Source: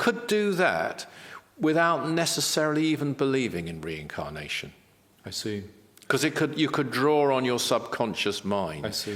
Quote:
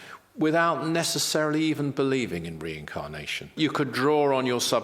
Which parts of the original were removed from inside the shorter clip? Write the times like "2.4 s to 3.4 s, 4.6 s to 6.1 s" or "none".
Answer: 4.8 s to 6.5 s